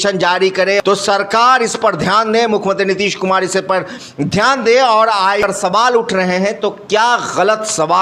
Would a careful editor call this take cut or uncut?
cut